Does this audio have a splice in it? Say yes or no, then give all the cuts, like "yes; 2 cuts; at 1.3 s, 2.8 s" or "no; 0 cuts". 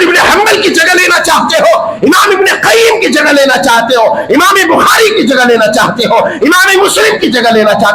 no; 0 cuts